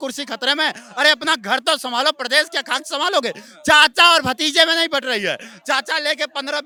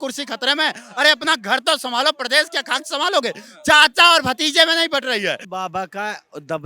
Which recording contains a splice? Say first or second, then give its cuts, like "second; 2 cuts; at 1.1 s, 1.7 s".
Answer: second; 1 cut; at 5.4 s